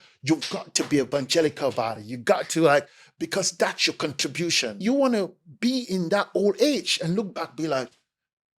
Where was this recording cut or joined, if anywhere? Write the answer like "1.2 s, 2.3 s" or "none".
4.8 s